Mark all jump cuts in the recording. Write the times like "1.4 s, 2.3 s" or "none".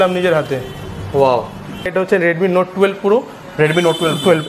1.9 s